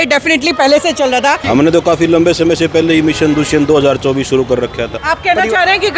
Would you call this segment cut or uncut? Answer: cut